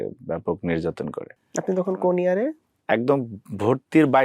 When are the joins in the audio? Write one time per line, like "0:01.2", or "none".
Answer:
0:01.3
0:02.7